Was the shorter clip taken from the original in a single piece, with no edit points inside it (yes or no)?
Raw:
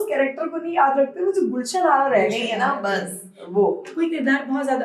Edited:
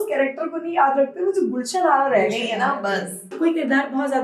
no